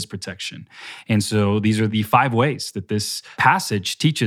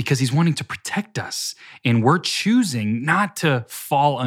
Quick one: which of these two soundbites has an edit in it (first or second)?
first